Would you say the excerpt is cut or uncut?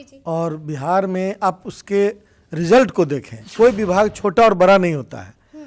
cut